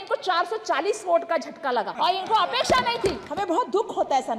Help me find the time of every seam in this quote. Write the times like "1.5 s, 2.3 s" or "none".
1.9 s, 3.2 s